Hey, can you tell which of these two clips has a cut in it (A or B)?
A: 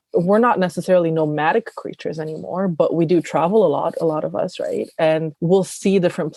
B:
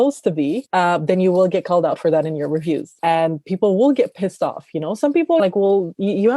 B